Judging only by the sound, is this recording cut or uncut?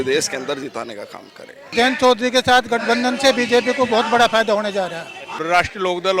cut